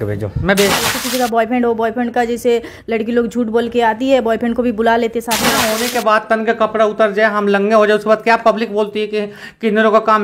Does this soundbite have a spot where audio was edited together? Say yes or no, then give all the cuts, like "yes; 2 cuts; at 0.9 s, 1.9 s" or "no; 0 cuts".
yes; 2 cuts; at 0.9 s, 5.6 s